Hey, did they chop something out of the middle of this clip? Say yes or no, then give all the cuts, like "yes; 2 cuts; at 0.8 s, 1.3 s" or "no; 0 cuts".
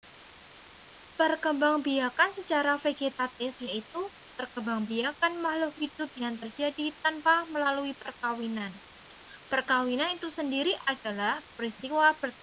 yes; 1 cut; at 1.0 s